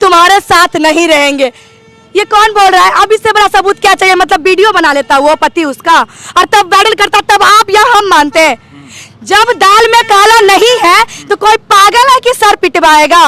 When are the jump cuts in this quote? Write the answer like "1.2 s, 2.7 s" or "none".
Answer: none